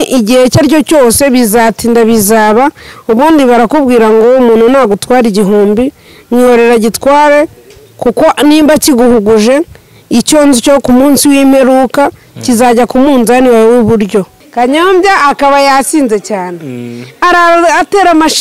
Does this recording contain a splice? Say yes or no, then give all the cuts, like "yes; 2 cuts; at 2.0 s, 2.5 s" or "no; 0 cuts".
yes; 1 cut; at 14.4 s